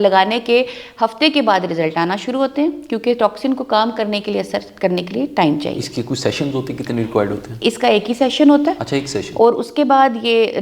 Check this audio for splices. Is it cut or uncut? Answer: uncut